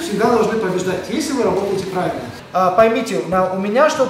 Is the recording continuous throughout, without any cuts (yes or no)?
no